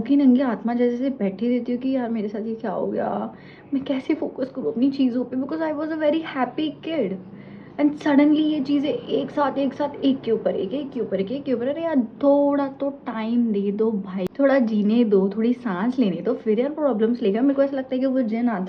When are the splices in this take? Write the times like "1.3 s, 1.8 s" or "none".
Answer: none